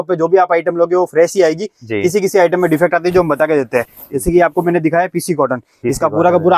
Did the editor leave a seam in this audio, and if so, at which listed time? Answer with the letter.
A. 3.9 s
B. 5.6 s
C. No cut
C